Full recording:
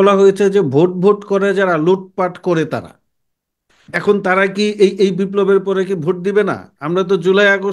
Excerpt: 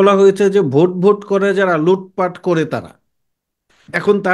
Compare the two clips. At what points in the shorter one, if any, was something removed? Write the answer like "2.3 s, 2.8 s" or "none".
none